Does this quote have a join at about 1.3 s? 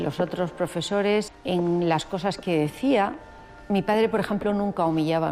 yes; 1 cut; at 1.3 s

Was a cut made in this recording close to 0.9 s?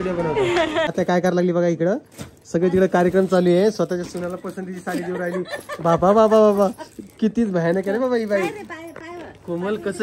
yes; 1 cut; at 0.9 s

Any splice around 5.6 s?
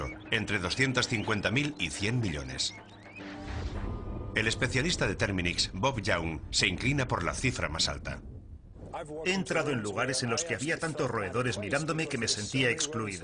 yes; 1 cut; at 5.6 s

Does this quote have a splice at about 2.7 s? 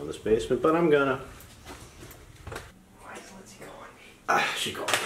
yes; 1 cut; at 2.7 s

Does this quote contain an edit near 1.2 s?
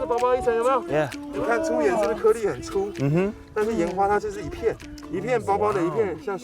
yes; 2 cuts; at 1.2 s, 4.9 s

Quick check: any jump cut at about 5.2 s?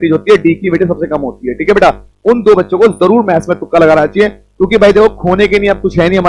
no; 1 cut; at 2.1 s

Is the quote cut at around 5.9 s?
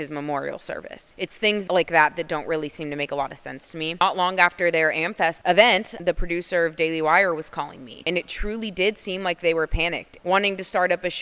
yes; 5 cuts; at 1.6 s, 3.9 s, 5.4 s, 5.9 s, 10.1 s

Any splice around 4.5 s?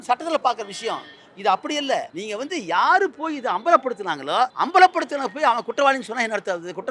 yes; 2 cuts; at 2.2 s, 4.5 s

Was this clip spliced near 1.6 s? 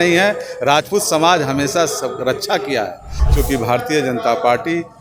no; 1 cut; at 3.1 s

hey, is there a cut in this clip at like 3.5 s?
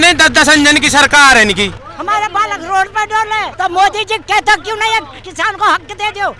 yes; 2 cuts; at 1.8 s, 3.5 s

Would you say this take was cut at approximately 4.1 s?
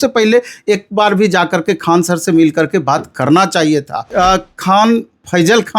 yes; 1 cut; at 4.1 s

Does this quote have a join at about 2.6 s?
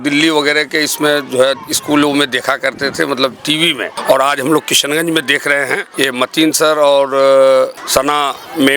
no; 3 cuts; at 3.9 s, 5.9 s, 7.8 s

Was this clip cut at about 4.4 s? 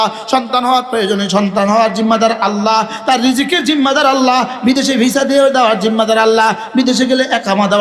no; 0 cuts

